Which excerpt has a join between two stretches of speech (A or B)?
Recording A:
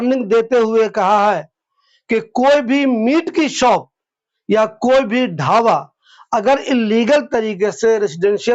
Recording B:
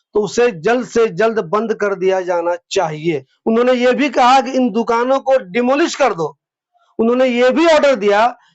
B